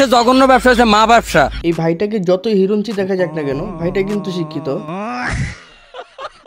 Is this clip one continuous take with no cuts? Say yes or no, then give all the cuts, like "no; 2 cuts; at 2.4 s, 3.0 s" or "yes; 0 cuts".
yes; 0 cuts